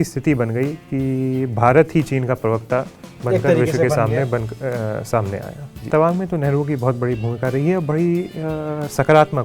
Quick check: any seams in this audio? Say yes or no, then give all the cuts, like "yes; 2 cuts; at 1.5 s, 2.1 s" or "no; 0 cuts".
yes; 1 cut; at 5.8 s